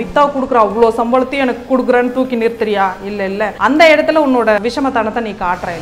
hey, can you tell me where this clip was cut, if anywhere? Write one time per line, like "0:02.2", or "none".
0:03.5
0:04.6